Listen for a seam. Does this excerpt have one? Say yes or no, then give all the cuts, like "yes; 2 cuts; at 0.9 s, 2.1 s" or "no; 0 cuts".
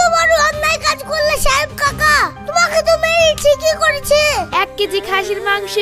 yes; 1 cut; at 4.5 s